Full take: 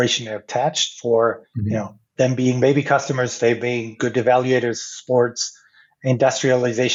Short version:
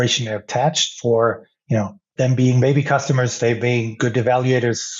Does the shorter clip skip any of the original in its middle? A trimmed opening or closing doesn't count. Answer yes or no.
no